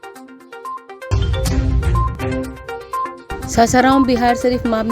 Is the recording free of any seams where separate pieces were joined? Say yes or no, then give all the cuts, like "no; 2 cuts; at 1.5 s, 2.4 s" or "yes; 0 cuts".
no; 1 cut; at 1.1 s